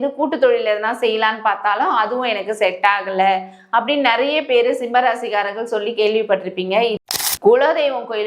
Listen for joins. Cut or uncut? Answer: cut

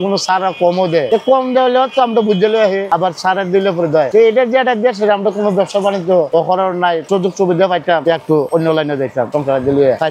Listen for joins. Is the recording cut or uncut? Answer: uncut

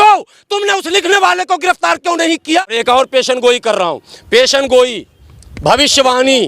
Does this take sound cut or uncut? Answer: cut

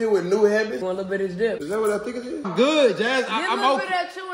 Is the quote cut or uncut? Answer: cut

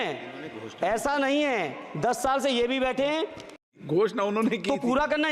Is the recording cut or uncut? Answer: cut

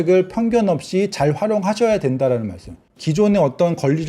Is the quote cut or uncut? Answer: cut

